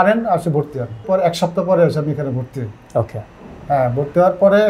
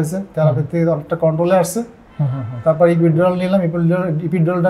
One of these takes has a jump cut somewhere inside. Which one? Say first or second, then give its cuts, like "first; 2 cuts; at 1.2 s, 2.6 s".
first; 1 cut; at 1.0 s